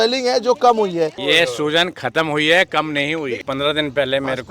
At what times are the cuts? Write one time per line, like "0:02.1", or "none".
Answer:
0:01.2
0:03.4